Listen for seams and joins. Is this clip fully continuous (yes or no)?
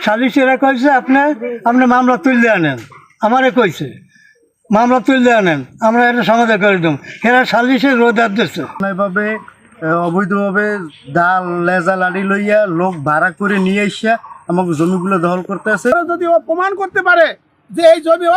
no